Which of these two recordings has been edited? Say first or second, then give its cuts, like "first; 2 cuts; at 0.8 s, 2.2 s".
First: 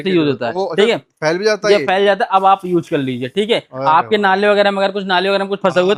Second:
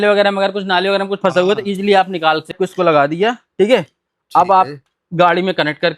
second; 1 cut; at 2.6 s